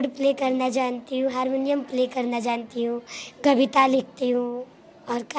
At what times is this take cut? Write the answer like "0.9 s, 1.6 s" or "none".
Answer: none